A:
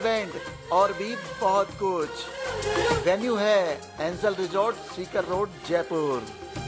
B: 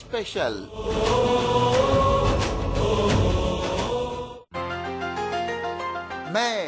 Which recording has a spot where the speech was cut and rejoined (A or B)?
B